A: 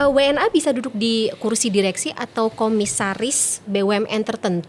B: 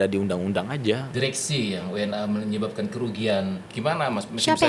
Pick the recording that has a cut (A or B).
B